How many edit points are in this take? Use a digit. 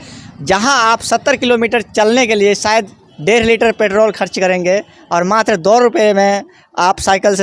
0